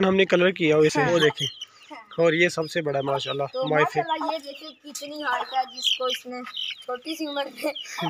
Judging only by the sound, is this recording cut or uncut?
cut